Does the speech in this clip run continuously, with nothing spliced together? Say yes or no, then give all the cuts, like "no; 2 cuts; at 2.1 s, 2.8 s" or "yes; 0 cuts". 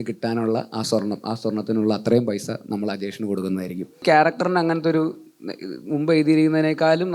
no; 1 cut; at 4.0 s